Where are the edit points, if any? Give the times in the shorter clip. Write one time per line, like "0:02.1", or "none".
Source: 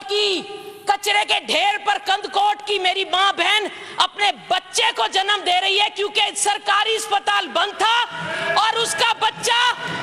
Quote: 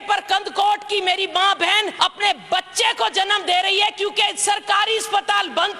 0:01.9